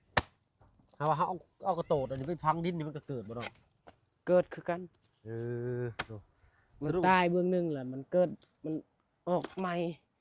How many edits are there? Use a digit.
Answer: 0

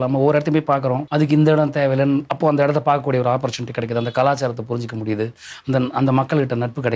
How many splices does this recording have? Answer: 1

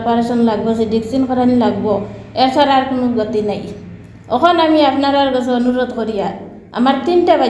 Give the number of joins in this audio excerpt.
0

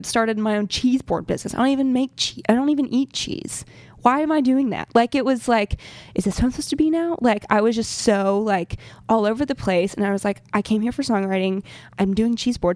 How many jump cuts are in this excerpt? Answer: 0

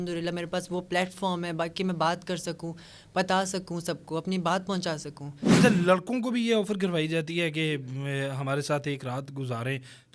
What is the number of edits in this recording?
1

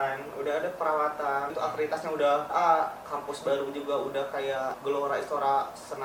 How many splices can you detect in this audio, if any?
3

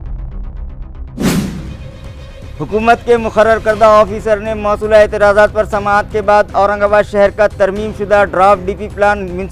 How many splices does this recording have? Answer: 1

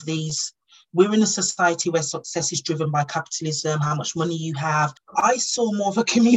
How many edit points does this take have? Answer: 1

